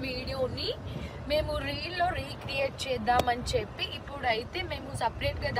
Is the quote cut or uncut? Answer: uncut